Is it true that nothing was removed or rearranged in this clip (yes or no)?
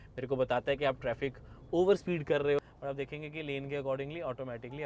no